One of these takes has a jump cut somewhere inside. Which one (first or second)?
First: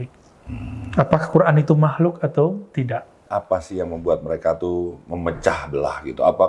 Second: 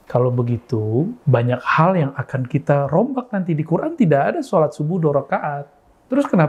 first